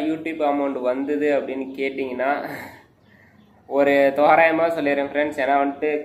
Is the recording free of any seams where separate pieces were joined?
yes; 0 cuts

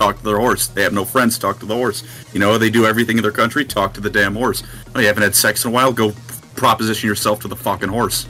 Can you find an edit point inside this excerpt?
no; 0 cuts

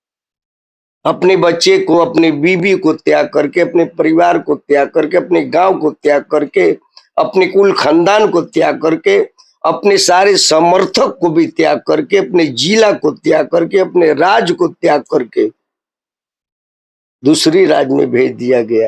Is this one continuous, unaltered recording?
yes; 0 cuts

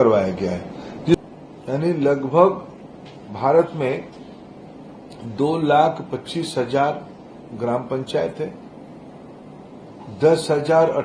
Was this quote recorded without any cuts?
no; 1 cut; at 1.1 s

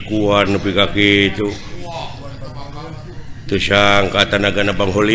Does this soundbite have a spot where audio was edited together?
no; 0 cuts

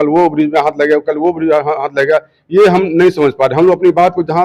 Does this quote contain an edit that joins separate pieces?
no; 0 cuts

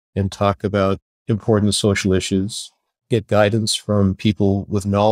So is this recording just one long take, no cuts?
no; 1 cut; at 1.1 s

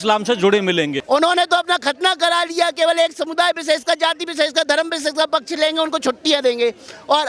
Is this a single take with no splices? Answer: no; 1 cut; at 1.0 s

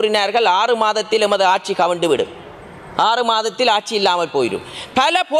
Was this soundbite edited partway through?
no; 0 cuts

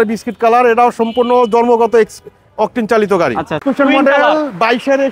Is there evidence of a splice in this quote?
yes; 1 cut; at 3.6 s

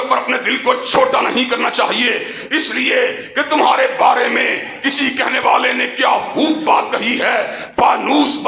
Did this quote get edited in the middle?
no; 0 cuts

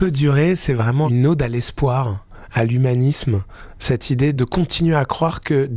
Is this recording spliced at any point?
yes; 2 cuts; at 1.1 s, 4.4 s

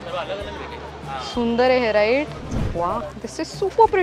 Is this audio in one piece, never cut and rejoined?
no; 1 cut; at 2.6 s

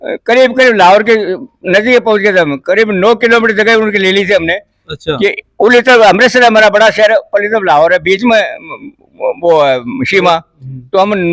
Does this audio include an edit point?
no; 0 cuts

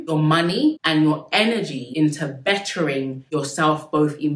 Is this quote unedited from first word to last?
no; 2 cuts; at 1.8 s, 3.2 s

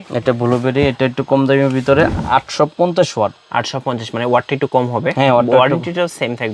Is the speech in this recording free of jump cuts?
yes; 0 cuts

